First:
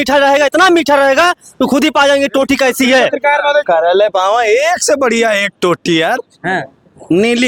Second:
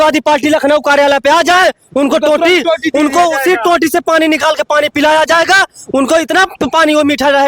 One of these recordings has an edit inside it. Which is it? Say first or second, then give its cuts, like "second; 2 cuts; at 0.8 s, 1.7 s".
first; 1 cut; at 3.7 s